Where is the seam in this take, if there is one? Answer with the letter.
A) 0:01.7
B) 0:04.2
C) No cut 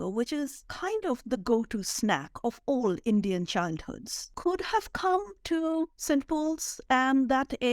B